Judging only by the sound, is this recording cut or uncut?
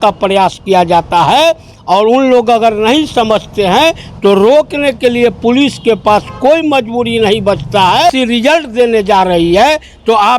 cut